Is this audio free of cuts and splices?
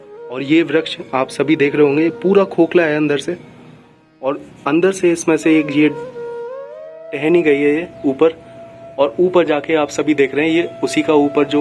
yes; 0 cuts

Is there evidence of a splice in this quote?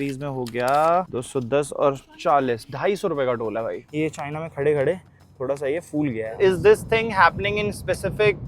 yes; 2 cuts; at 3.8 s, 6.3 s

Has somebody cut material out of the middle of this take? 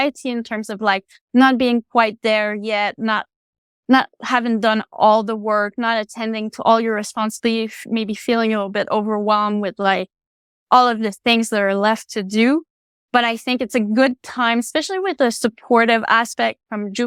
no; 0 cuts

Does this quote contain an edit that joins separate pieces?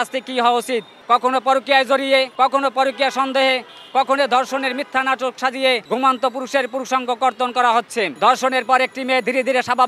yes; 4 cuts; at 1.0 s, 2.3 s, 5.8 s, 8.1 s

